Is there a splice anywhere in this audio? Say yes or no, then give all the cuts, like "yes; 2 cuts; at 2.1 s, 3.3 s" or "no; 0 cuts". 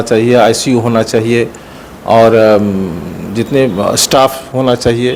no; 0 cuts